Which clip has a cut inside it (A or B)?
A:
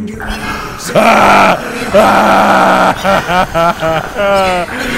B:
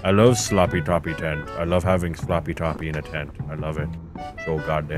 A